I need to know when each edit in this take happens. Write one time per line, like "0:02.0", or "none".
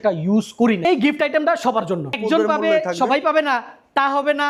0:00.8
0:02.2